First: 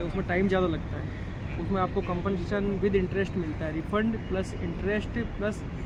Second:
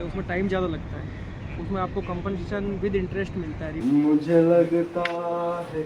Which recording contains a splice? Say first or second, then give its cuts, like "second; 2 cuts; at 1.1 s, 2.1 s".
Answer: second; 1 cut; at 3.8 s